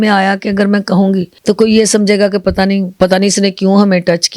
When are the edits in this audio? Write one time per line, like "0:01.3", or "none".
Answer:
0:01.3
0:02.9